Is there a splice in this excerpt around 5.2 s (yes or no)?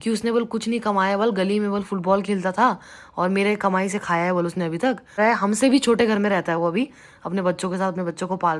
yes